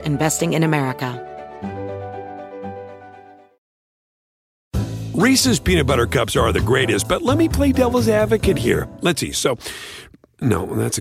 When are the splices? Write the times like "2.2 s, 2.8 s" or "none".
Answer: 1.1 s